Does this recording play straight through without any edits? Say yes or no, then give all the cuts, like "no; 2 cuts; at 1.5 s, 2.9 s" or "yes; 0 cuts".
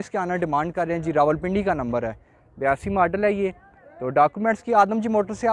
yes; 0 cuts